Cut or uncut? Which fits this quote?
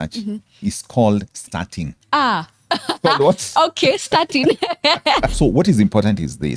cut